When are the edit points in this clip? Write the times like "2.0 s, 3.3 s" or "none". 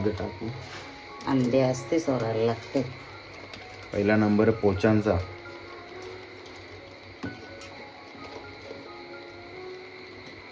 none